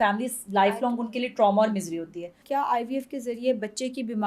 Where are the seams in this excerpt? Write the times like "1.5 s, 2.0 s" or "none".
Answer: 2.4 s